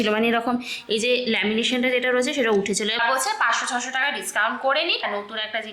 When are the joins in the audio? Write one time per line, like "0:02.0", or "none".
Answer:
0:03.0
0:05.0